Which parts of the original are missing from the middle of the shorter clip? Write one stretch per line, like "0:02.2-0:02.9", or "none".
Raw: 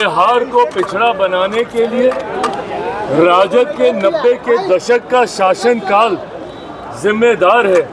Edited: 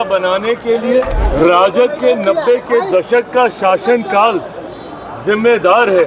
0:02.3-0:03.0

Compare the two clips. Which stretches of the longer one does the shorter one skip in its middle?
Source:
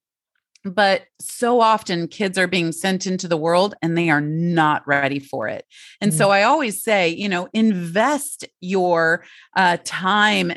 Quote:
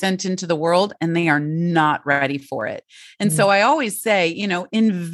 none

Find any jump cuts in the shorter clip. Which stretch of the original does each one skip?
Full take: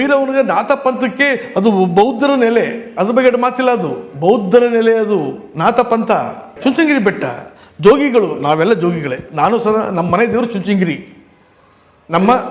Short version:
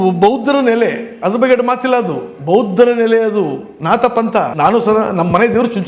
0:06.3-0:09.3

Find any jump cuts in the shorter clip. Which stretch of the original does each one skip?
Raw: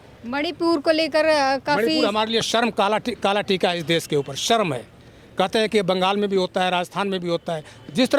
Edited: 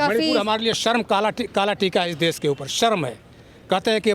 none

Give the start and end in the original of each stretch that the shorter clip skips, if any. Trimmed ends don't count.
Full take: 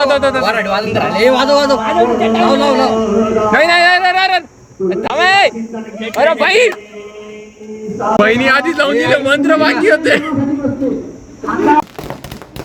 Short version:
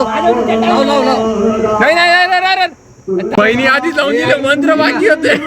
0:05.1-0:08.2

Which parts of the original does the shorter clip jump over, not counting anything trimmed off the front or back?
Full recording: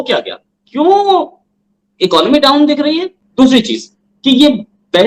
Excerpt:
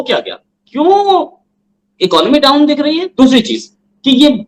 0:03.1-0:03.3

